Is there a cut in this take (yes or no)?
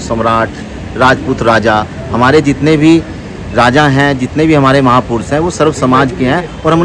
no